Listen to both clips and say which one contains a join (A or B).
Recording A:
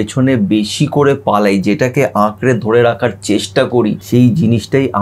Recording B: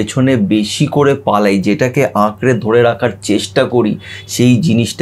A